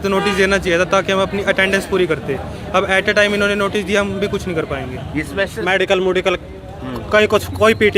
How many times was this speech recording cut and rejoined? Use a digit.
1